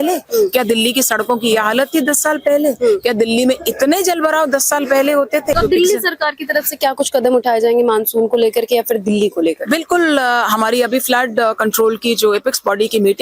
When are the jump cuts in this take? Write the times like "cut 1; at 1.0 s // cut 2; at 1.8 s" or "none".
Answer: cut 1; at 5.5 s

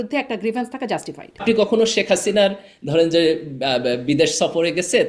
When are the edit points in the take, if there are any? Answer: cut 1; at 1.3 s

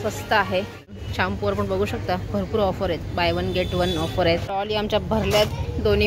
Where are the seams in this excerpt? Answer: cut 1; at 1.0 s // cut 2; at 4.5 s

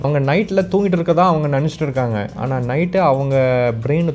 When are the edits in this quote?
none

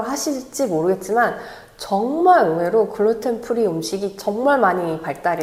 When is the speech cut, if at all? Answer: none

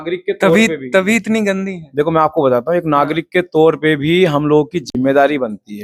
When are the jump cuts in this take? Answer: none

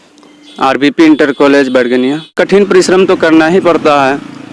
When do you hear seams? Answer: cut 1; at 2.4 s

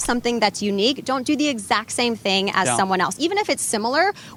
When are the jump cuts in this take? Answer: none

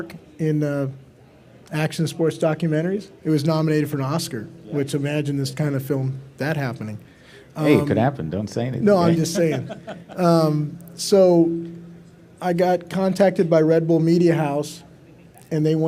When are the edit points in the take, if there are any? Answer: none

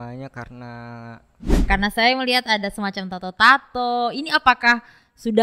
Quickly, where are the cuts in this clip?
cut 1; at 1.5 s

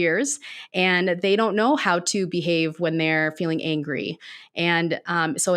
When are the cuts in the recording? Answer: none

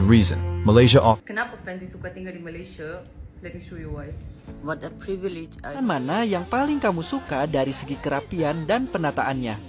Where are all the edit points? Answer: cut 1; at 1.2 s // cut 2; at 5.8 s

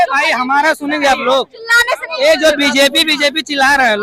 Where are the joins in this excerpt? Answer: none

